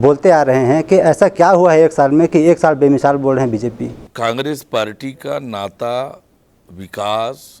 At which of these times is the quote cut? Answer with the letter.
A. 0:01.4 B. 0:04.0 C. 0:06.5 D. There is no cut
B